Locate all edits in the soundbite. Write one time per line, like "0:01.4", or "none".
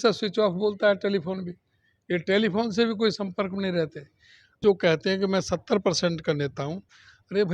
0:04.6